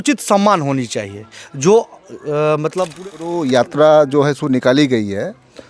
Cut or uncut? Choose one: cut